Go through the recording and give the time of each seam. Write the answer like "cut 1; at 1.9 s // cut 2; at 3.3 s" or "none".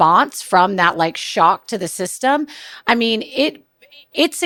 none